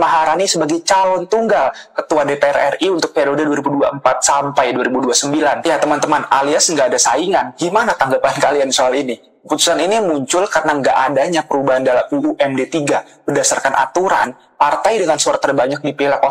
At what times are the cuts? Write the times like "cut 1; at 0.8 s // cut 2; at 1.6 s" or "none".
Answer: none

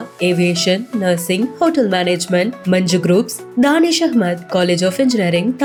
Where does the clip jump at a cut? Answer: none

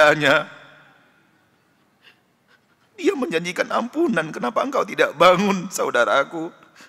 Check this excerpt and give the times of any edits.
none

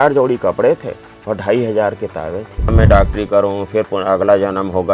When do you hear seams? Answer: cut 1; at 2.7 s

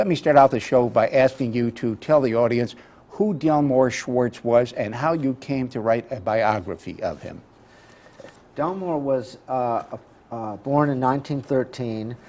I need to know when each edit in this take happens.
cut 1; at 2.0 s

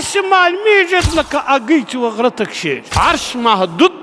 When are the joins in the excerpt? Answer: cut 1; at 1.0 s // cut 2; at 3.0 s

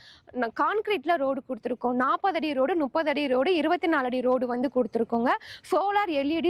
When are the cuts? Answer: none

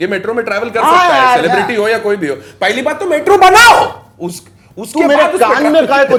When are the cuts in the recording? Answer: none

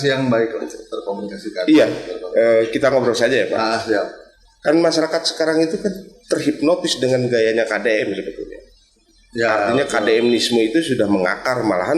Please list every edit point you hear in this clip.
none

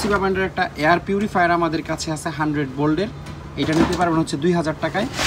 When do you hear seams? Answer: none

